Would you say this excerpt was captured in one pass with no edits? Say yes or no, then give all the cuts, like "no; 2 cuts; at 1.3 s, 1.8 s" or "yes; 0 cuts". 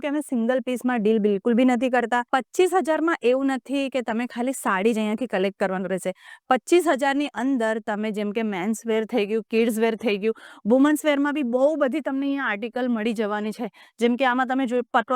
no; 1 cut; at 2.3 s